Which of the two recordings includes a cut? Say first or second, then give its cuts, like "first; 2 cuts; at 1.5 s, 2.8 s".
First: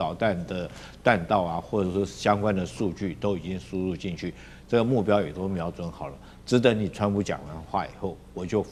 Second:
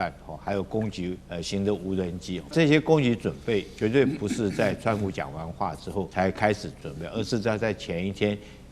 second; 4 cuts; at 1.2 s, 2.5 s, 6.1 s, 6.7 s